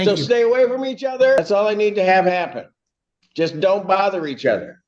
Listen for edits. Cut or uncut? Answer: cut